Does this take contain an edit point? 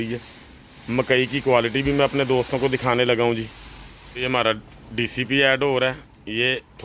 yes; 1 cut; at 4.2 s

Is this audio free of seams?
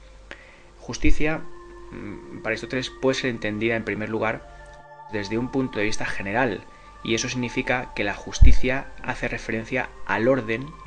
yes; 0 cuts

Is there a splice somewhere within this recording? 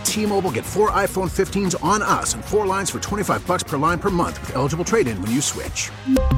no; 0 cuts

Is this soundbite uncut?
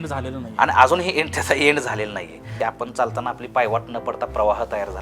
no; 1 cut; at 2.5 s

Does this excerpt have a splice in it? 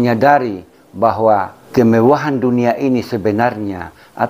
yes; 1 cut; at 1.6 s

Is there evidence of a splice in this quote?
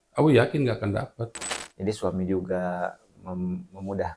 yes; 1 cut; at 1.4 s

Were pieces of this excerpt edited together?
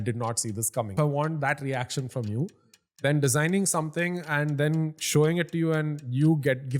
yes; 1 cut; at 0.9 s

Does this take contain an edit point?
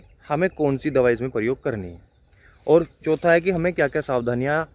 no; 0 cuts

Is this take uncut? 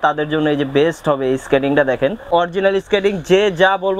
no; 1 cut; at 2.2 s

